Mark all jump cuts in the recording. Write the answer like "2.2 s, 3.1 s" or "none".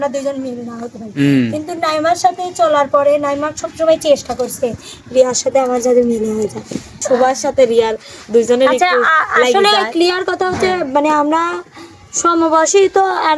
7.0 s